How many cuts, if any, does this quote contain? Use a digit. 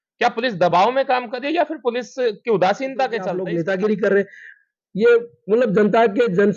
1